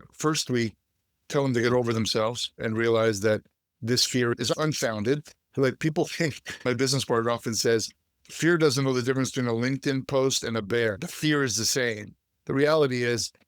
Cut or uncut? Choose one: cut